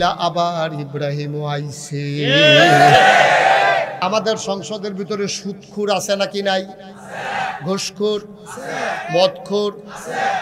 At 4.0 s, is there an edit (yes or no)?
yes